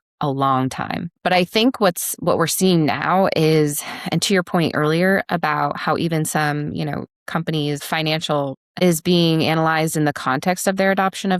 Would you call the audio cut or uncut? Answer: cut